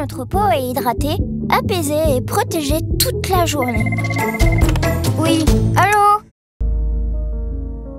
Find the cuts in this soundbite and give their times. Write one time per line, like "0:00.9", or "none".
0:06.4